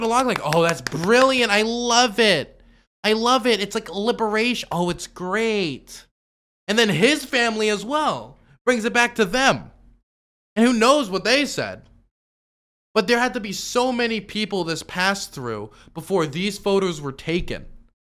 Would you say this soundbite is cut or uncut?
uncut